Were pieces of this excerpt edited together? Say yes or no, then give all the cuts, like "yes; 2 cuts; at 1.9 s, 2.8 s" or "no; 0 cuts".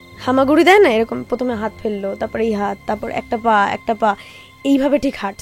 no; 0 cuts